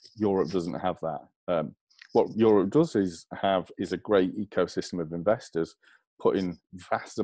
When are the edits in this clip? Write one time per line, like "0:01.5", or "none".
none